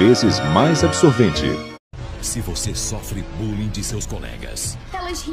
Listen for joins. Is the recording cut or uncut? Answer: cut